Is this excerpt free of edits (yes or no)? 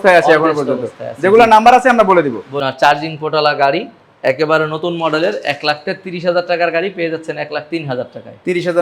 no